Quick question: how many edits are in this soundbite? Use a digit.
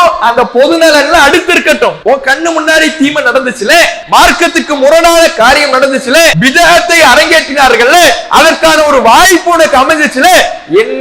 3